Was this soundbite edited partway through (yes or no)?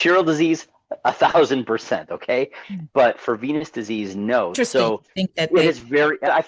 no